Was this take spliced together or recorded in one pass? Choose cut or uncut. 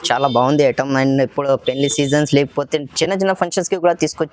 uncut